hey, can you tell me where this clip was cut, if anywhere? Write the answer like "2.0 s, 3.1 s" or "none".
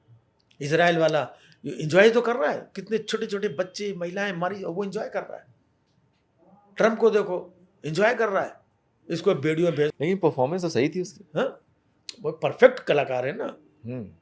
9.9 s